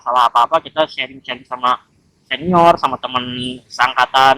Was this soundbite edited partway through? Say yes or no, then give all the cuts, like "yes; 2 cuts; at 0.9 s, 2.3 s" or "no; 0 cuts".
no; 0 cuts